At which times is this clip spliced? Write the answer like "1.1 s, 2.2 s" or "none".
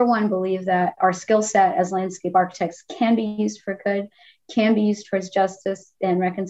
1.0 s